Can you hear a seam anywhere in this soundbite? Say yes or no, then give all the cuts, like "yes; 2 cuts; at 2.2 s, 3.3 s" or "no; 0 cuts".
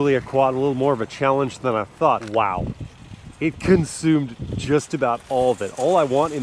yes; 1 cut; at 2.2 s